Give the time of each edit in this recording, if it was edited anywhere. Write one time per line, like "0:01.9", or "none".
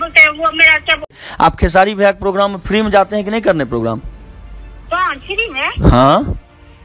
0:01.1